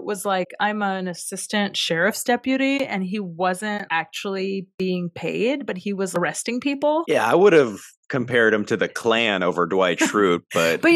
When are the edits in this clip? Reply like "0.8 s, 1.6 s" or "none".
3.8 s, 6.1 s